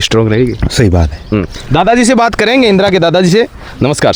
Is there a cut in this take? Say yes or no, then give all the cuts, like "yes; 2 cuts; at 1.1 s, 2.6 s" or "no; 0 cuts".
no; 0 cuts